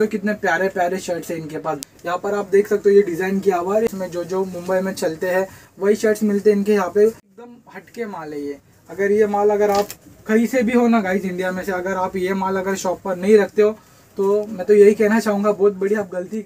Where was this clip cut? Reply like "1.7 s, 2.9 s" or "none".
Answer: 1.8 s, 3.9 s, 7.3 s